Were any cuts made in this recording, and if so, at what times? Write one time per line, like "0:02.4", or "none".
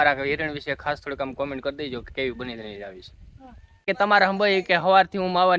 0:03.8